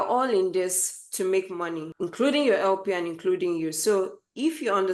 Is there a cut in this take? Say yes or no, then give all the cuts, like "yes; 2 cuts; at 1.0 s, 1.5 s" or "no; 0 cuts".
no; 0 cuts